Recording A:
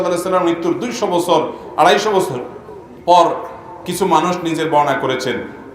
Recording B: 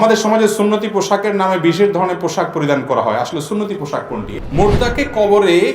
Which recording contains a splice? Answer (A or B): B